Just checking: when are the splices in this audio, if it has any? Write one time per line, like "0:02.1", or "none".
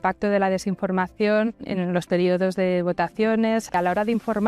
0:01.6
0:03.7

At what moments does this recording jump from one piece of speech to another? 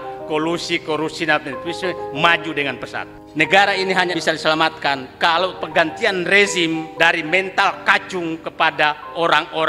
0:03.2
0:04.2
0:06.9

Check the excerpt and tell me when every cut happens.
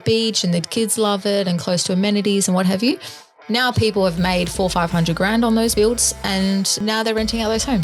0:05.7
0:06.7

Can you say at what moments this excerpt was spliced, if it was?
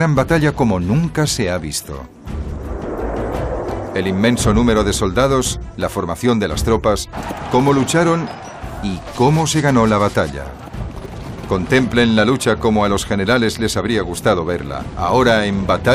0:11.9

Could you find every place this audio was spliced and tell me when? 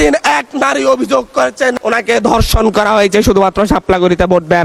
none

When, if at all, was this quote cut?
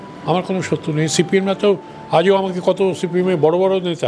none

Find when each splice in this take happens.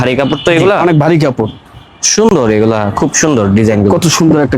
none

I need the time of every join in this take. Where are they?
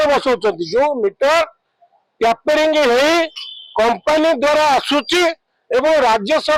none

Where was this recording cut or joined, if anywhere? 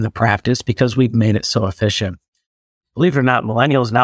0:02.6

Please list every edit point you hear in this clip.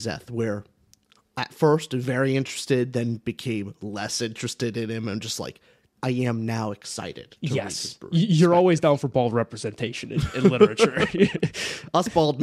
0:05.8

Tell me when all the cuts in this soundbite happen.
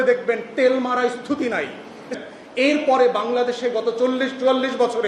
0:02.2

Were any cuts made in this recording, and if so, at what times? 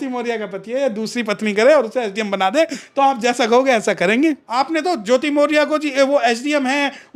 0:04.5

